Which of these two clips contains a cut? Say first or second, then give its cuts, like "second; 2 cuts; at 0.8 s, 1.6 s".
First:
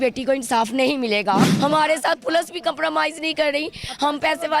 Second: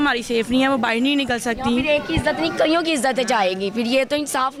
first; 1 cut; at 1.5 s